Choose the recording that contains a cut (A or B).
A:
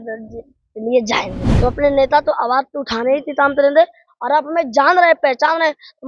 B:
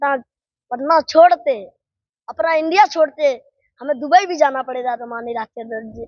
A